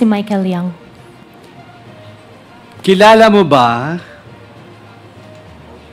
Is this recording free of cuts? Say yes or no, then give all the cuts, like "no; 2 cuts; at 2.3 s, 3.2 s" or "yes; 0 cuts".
yes; 0 cuts